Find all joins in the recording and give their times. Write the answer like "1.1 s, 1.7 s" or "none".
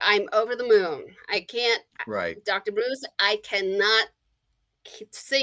none